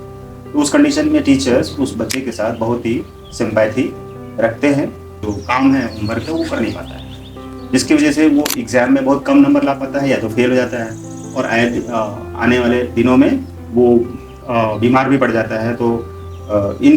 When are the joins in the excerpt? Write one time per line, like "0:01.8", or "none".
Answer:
0:05.1